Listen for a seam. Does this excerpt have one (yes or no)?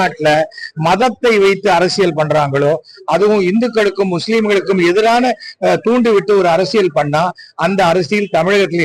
no